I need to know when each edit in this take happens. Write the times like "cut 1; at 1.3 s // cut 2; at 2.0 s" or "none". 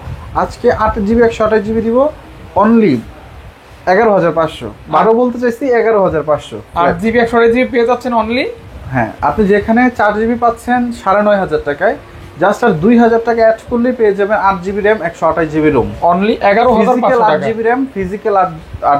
none